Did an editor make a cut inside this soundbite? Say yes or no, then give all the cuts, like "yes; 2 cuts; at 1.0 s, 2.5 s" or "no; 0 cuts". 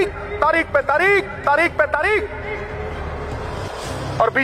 no; 0 cuts